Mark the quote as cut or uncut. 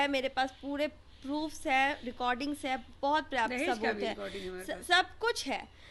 uncut